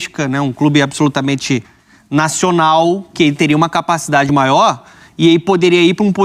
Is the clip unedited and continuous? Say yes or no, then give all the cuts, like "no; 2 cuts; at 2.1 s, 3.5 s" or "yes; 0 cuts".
yes; 0 cuts